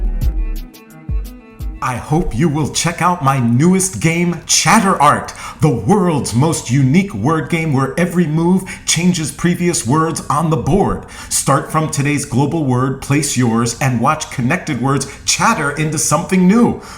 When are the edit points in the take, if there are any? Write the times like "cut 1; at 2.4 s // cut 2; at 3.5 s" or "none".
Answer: cut 1; at 1.6 s